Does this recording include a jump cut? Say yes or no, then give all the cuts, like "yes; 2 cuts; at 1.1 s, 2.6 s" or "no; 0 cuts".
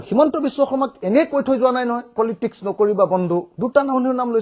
yes; 1 cut; at 3.5 s